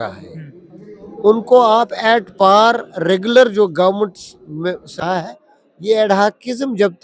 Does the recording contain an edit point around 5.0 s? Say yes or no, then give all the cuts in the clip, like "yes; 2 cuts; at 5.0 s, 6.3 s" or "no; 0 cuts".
yes; 1 cut; at 5.0 s